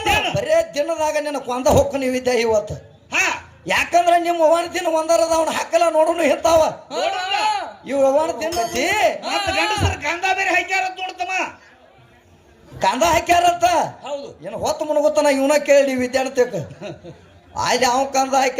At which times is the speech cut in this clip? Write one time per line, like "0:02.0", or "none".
0:08.6